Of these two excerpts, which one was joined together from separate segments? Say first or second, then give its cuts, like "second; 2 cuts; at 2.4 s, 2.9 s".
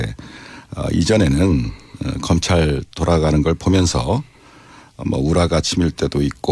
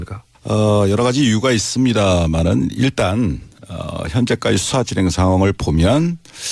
first; 1 cut; at 2.4 s